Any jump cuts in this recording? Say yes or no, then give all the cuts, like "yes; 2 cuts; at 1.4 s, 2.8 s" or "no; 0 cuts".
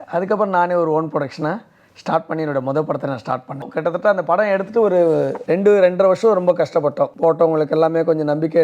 yes; 3 cuts; at 3.7 s, 5.4 s, 7.1 s